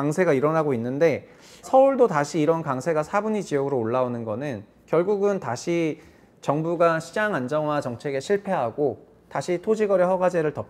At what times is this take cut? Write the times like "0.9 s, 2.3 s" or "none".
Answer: 1.7 s